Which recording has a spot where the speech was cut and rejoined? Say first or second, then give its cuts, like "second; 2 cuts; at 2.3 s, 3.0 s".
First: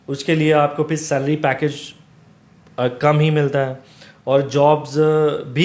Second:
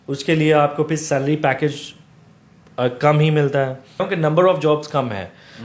second; 1 cut; at 4.0 s